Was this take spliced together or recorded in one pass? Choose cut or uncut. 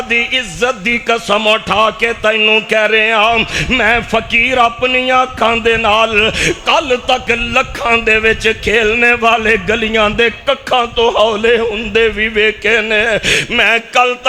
uncut